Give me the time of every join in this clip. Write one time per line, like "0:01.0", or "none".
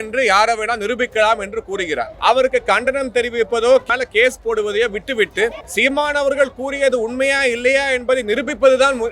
0:02.1
0:03.8
0:05.6